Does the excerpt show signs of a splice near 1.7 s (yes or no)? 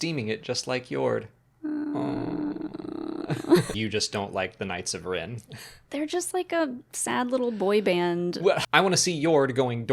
no